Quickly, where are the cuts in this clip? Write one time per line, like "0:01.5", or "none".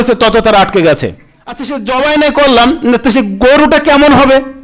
0:01.7